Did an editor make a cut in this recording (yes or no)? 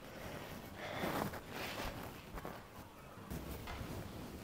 yes